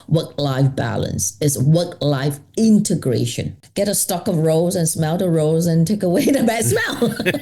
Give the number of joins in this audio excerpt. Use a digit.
1